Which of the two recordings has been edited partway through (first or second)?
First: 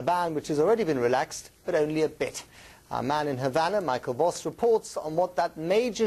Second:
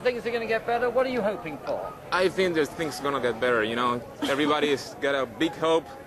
second